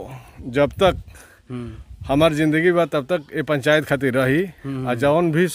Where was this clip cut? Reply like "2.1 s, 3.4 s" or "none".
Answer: none